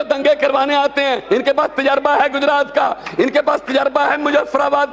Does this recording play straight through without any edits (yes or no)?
yes